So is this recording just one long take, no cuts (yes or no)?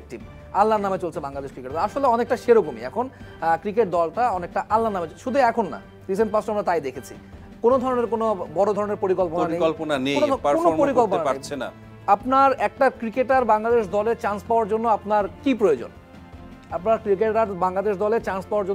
yes